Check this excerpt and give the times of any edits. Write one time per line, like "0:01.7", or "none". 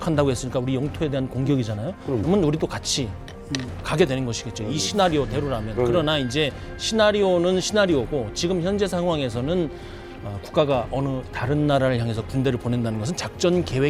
none